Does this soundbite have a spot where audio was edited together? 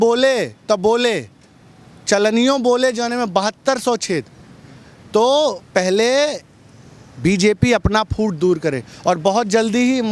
no; 0 cuts

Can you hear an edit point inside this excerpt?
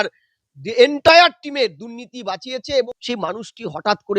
yes; 1 cut; at 3.0 s

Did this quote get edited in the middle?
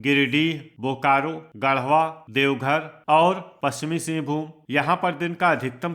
yes; 3 cuts; at 1.4 s, 3.5 s, 4.6 s

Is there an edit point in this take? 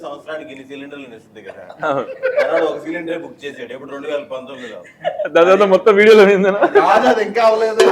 no; 0 cuts

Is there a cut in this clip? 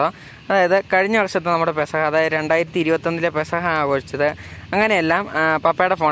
no; 0 cuts

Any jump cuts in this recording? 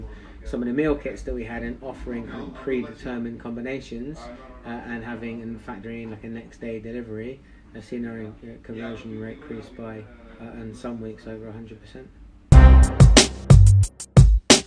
yes; 1 cut; at 12.3 s

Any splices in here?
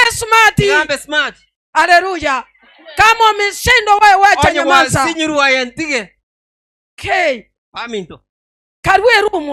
no; 0 cuts

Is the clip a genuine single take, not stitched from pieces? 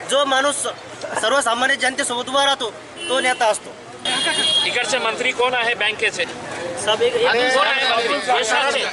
no; 1 cut; at 4.1 s

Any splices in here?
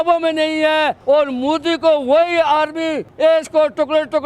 yes; 1 cut; at 3.3 s

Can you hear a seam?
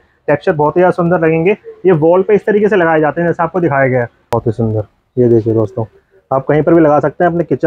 yes; 1 cut; at 4.3 s

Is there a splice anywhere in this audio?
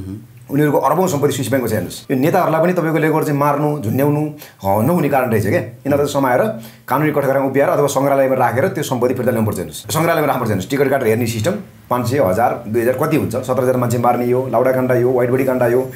yes; 2 cuts; at 2.0 s, 9.8 s

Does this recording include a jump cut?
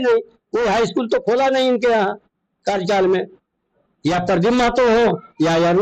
no; 0 cuts

